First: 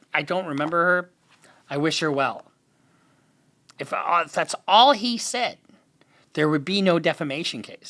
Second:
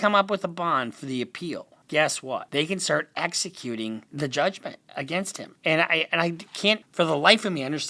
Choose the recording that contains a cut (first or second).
second